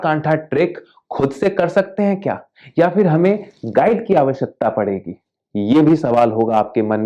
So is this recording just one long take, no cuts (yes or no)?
yes